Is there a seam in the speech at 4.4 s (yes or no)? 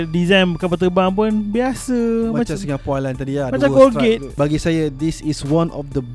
yes